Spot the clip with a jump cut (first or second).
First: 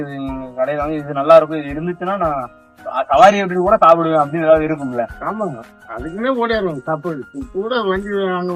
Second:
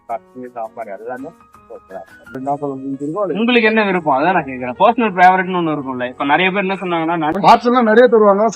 second